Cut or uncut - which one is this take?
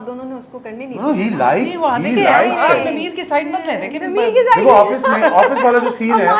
uncut